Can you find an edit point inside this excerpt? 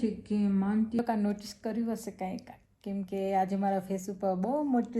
yes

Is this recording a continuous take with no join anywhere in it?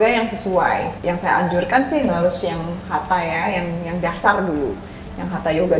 no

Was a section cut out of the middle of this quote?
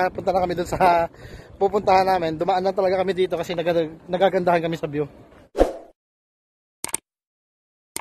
yes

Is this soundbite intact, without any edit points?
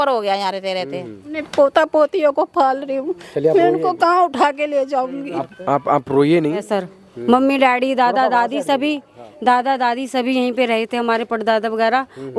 no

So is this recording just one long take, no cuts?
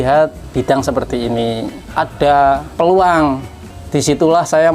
no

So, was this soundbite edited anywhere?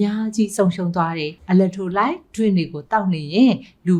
yes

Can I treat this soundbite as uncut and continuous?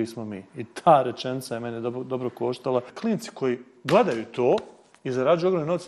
no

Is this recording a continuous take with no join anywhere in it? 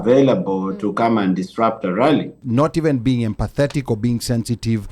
no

